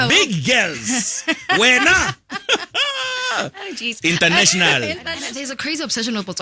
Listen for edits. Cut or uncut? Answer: cut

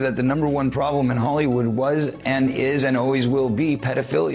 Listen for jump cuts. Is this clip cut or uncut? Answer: uncut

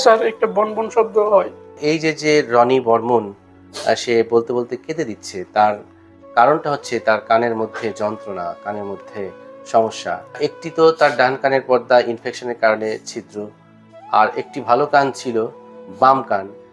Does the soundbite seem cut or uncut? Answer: cut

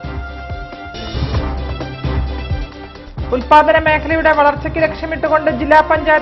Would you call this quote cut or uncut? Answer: cut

